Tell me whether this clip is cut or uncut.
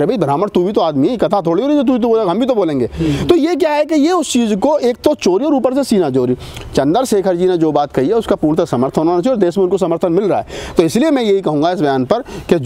uncut